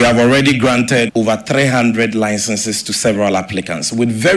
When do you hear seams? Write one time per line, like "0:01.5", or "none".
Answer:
0:01.1